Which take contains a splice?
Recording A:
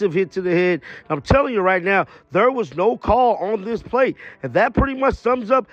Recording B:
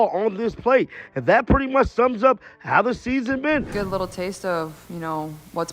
B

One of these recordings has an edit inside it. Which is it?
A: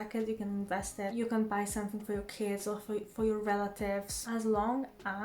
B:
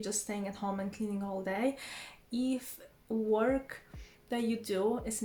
A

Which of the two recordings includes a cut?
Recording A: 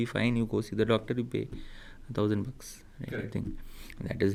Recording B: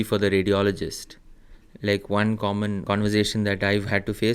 B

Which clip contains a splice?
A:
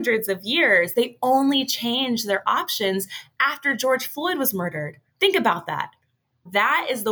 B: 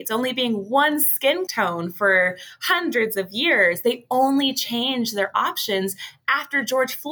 B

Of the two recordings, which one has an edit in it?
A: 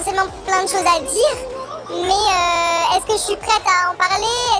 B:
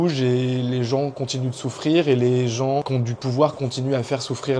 B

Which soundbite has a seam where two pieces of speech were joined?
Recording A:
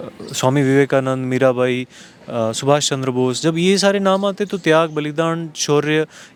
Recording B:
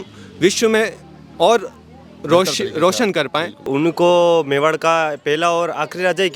B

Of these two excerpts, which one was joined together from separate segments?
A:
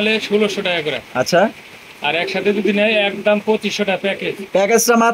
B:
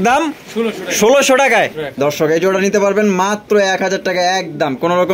B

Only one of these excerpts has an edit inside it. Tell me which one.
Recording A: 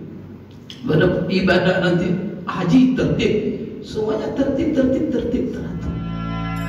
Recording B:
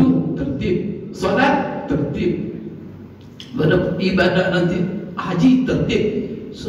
A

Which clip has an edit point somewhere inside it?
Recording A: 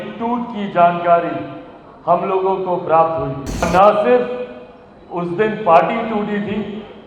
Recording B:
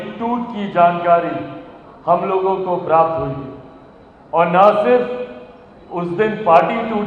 A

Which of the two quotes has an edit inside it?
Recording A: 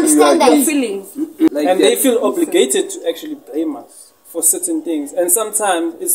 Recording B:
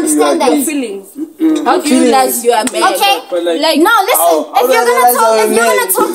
A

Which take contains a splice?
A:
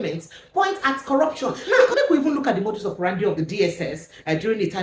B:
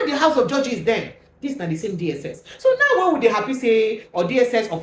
A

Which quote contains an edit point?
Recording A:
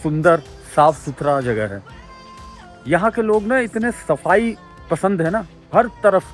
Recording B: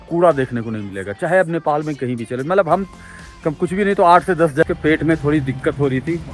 B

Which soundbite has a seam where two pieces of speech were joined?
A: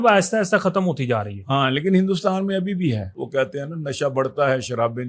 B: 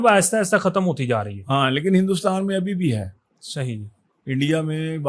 A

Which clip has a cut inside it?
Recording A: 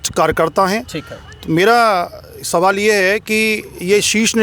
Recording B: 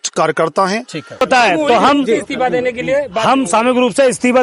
B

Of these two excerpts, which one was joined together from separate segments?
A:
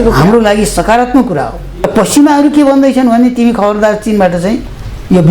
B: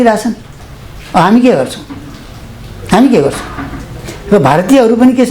A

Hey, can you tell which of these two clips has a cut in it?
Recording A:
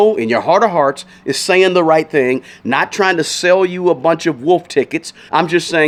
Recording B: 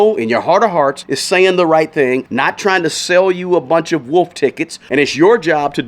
B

